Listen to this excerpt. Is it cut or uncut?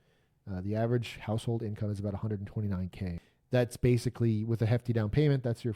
cut